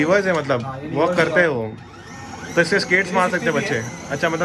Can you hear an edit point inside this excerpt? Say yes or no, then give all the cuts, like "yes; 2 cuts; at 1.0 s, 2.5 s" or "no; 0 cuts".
no; 0 cuts